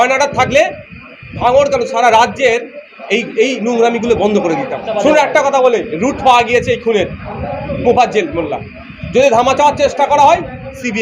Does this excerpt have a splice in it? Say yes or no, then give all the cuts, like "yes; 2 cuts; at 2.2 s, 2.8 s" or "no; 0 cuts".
yes; 1 cut; at 4.8 s